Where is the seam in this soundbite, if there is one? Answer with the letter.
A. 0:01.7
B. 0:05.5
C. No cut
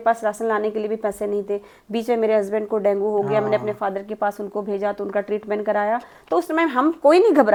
C